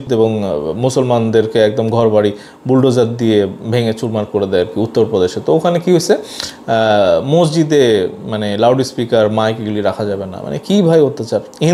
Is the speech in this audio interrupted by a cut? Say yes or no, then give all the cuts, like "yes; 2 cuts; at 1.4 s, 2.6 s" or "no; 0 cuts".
no; 0 cuts